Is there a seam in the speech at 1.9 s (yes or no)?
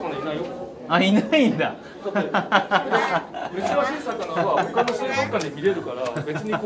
no